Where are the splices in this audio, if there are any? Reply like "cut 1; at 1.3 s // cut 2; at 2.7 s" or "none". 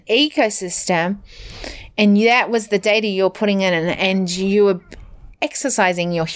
none